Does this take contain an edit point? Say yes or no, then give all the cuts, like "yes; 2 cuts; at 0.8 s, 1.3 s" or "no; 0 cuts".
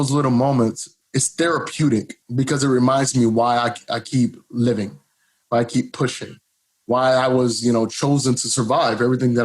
yes; 2 cuts; at 0.9 s, 2.2 s